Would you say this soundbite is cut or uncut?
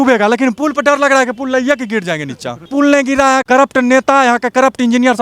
cut